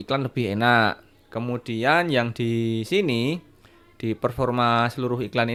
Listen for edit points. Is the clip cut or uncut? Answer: uncut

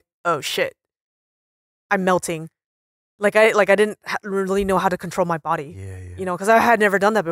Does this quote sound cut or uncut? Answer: uncut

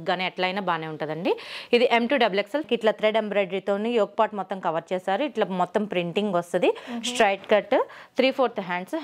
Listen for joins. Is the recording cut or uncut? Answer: cut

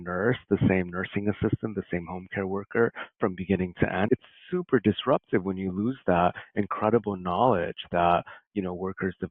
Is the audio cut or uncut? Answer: cut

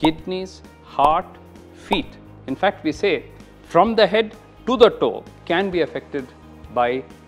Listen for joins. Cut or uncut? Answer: cut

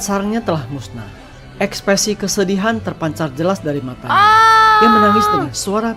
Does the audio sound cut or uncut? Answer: uncut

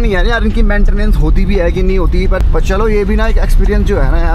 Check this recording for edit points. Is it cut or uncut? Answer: cut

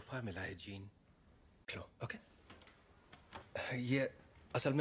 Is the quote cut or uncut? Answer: uncut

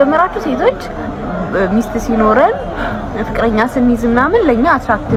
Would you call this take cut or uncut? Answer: uncut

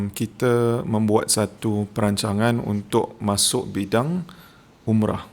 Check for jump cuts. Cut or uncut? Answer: uncut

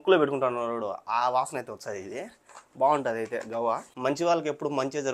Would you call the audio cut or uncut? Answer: cut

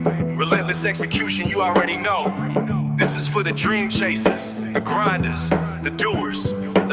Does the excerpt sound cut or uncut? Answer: uncut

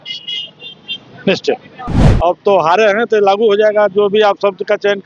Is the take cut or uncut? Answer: cut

